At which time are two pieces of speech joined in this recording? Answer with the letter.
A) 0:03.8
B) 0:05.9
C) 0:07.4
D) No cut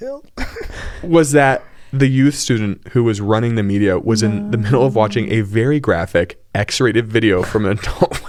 D